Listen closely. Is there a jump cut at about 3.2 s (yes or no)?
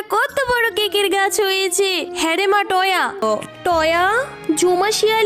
yes